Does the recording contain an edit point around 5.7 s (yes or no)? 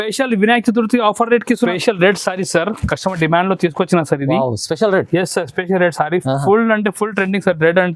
no